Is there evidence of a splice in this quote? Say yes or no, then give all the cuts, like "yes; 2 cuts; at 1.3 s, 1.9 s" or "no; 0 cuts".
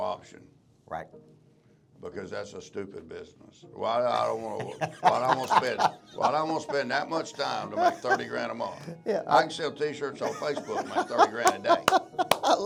no; 0 cuts